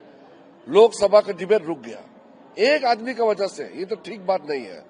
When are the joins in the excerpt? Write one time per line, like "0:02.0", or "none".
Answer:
none